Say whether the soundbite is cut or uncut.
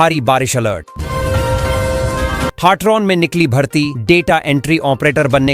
cut